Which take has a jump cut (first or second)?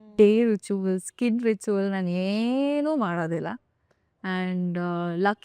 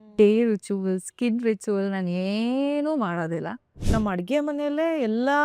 second